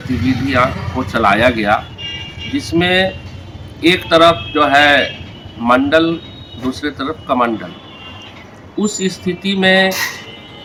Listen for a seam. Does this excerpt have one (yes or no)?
no